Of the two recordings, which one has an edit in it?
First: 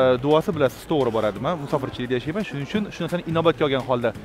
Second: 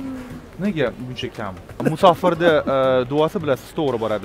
second; 1 cut; at 1.8 s

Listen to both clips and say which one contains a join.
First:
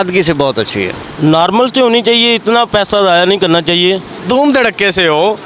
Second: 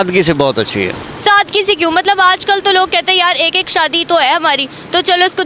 first; 2 cuts; at 1.0 s, 4.2 s

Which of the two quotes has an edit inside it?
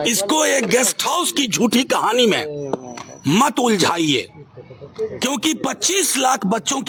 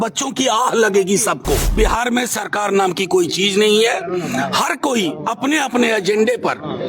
second; 1 cut; at 1.7 s

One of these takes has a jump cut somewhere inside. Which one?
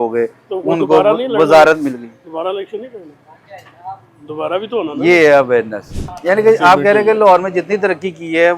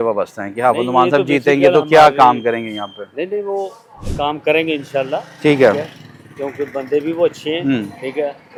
first; 1 cut; at 6.1 s

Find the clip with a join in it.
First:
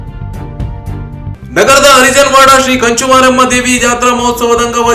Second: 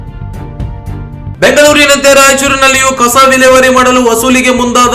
second; 1 cut; at 1.3 s

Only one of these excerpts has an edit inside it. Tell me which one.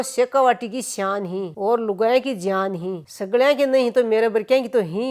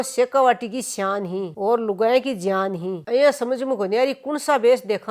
second; 1 cut; at 3.0 s

